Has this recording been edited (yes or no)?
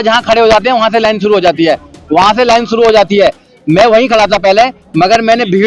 no